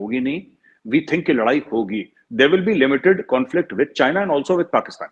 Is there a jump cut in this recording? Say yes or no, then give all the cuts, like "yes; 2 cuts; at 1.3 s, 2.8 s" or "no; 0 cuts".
no; 0 cuts